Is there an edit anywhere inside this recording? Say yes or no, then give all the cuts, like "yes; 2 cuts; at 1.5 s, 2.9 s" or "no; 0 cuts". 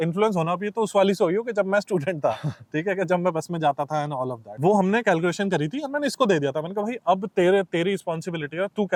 no; 0 cuts